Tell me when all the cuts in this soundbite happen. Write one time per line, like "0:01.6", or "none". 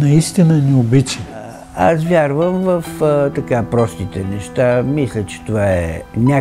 0:01.6